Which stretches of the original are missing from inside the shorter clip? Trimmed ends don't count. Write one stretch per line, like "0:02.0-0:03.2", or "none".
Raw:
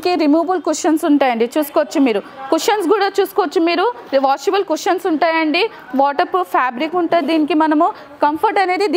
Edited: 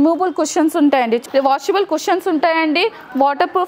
0:01.5-0:04.0